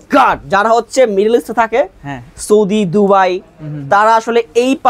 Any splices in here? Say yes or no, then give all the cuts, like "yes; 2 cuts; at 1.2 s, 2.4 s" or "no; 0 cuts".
no; 0 cuts